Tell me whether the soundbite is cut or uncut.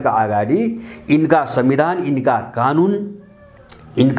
uncut